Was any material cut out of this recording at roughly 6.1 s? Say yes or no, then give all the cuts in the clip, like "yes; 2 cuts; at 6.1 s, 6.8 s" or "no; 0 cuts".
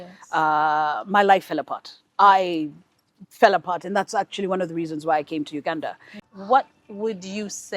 yes; 1 cut; at 6.1 s